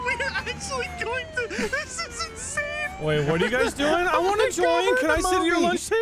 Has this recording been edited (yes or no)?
no